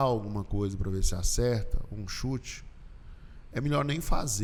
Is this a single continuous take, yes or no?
yes